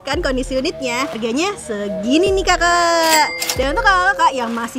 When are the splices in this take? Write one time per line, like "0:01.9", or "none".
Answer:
0:01.2